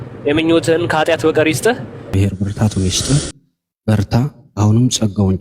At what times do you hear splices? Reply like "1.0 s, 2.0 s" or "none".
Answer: 2.1 s